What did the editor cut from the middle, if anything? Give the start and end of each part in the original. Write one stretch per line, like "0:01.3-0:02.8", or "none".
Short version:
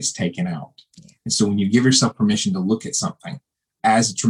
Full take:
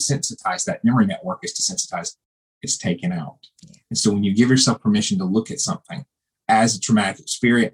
none